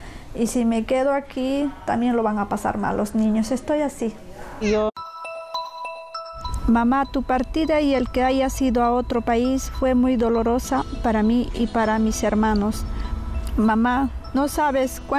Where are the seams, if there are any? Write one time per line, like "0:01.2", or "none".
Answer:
none